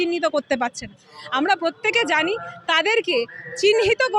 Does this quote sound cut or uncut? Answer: uncut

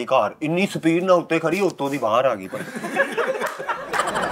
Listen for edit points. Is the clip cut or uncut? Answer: uncut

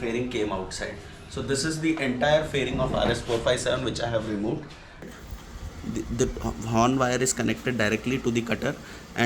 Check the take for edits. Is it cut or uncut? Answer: cut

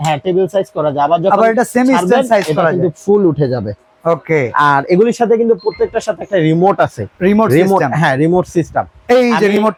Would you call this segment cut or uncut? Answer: uncut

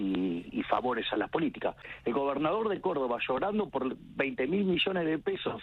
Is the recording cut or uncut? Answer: cut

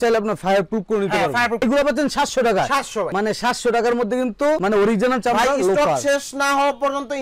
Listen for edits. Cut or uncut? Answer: cut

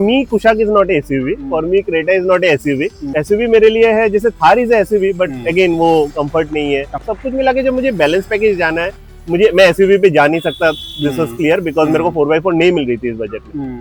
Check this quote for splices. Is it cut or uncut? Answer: uncut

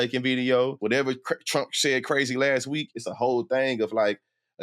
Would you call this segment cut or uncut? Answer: cut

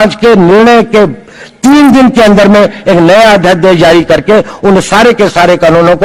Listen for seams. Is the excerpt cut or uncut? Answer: uncut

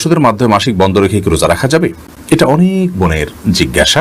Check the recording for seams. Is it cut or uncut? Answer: uncut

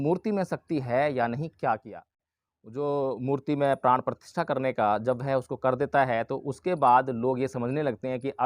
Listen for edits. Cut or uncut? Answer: cut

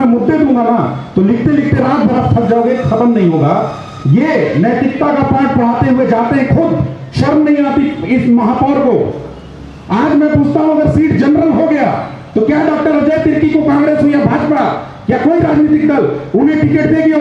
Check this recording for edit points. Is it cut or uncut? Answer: uncut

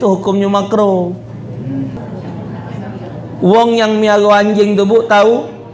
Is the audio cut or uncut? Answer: cut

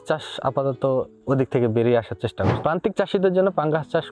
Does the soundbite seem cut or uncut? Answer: cut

